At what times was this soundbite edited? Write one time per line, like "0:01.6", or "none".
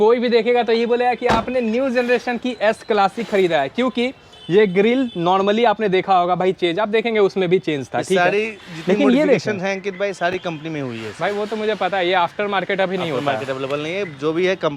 none